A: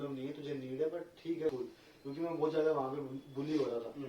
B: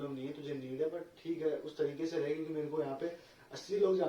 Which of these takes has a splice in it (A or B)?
A